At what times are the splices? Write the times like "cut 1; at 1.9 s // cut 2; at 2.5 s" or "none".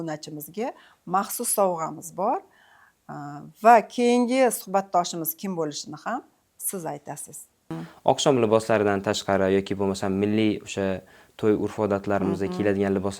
cut 1; at 7.5 s